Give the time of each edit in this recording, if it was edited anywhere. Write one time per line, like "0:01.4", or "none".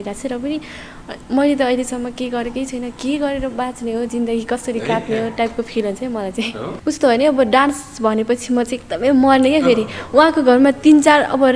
0:06.7

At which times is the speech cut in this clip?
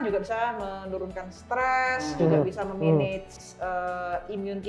0:03.4

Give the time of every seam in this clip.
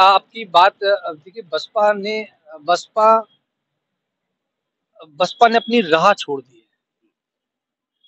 none

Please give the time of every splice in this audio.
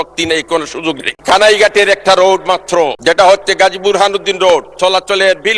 0:01.1
0:03.0

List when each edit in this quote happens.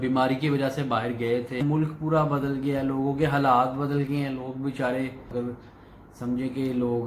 0:01.6
0:05.3

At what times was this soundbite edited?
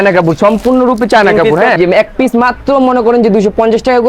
0:01.8

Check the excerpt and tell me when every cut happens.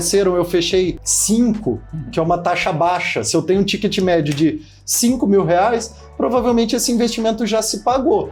none

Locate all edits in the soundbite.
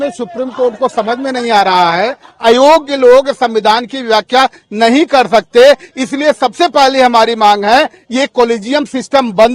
0:02.3

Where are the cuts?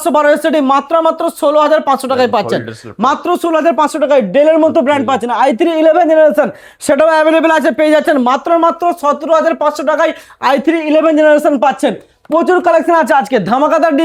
none

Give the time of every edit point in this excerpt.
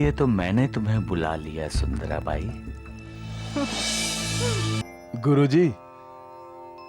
0:04.8

